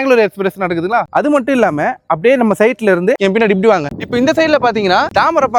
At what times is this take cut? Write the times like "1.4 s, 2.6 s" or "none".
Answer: none

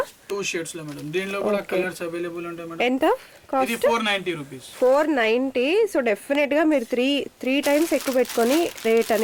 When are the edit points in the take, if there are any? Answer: none

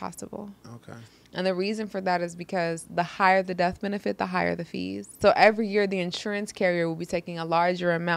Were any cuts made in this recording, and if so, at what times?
5.0 s

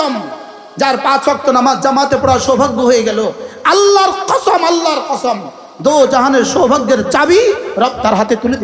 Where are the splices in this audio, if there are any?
none

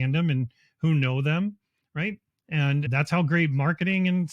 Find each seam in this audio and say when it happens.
2.9 s

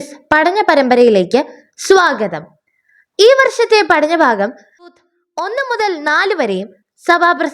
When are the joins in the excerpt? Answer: 4.9 s

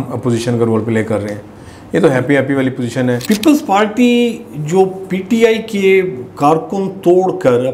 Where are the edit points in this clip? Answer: 3.2 s

